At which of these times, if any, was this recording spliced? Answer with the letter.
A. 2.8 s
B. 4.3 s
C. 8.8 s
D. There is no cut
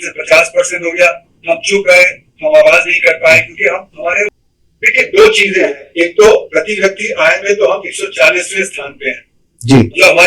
B